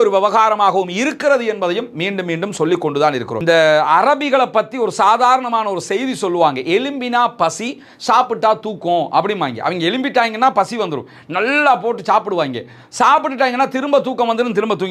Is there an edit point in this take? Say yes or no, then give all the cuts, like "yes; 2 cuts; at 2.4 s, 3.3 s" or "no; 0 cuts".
yes; 1 cut; at 3.3 s